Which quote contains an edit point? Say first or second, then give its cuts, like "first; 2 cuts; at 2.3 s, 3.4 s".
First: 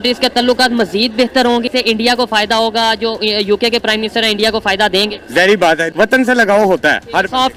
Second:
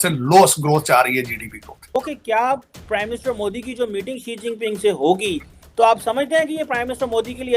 second; 2 cuts; at 1.7 s, 5.6 s